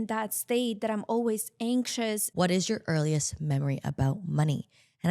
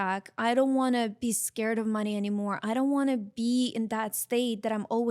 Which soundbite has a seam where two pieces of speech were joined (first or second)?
first